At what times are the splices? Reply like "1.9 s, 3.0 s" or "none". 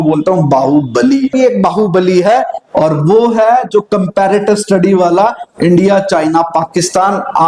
1.3 s